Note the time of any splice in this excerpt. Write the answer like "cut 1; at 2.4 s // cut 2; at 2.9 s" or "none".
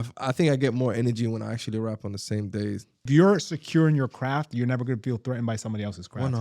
cut 1; at 3.0 s